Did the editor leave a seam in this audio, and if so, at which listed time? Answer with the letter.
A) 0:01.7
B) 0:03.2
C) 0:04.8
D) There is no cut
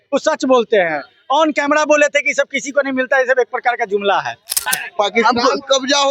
C